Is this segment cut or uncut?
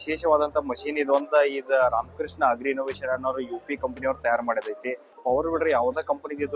cut